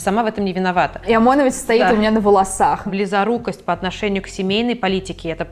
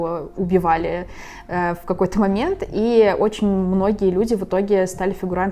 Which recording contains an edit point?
first; 2 cuts; at 1.0 s, 2.9 s

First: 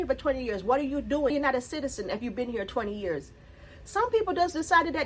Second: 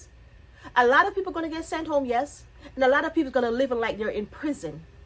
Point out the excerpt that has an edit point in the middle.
first; 1 cut; at 1.3 s

